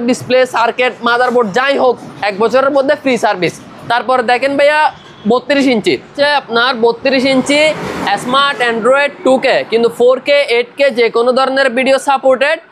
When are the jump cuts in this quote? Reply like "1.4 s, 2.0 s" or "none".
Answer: none